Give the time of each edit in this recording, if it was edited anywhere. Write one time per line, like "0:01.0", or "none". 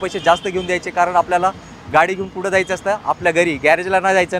none